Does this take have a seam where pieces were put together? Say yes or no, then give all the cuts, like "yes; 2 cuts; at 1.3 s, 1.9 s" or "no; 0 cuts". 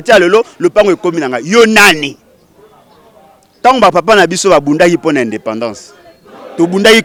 no; 0 cuts